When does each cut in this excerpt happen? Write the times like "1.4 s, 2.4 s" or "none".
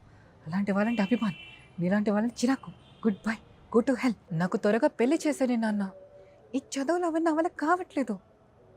4.2 s